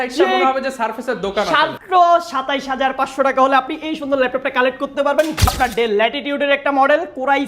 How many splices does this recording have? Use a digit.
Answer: 2